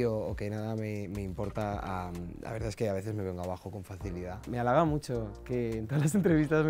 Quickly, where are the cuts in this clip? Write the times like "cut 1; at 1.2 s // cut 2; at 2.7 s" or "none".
cut 1; at 4.5 s